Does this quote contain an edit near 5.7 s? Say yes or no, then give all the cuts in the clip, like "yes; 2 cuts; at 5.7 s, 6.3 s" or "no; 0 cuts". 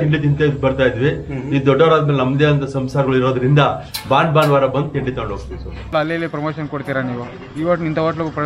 yes; 1 cut; at 5.7 s